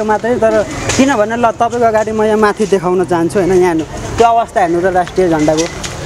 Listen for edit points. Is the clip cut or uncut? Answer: uncut